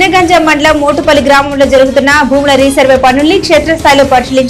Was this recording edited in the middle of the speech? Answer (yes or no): no